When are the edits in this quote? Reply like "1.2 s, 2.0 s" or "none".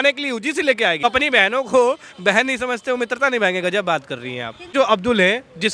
1.0 s, 4.7 s